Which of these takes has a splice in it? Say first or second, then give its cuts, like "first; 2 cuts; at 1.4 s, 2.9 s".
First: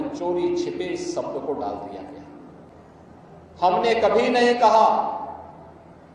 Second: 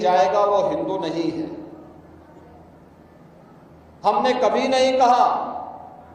first; 1 cut; at 2.7 s